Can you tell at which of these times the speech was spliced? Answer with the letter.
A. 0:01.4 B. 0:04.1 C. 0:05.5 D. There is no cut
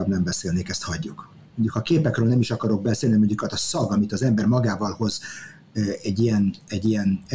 A